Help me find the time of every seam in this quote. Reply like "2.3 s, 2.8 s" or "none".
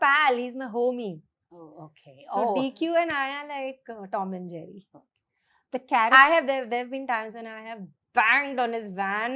none